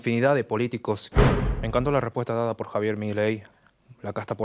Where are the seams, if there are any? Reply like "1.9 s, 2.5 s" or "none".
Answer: 1.0 s, 3.5 s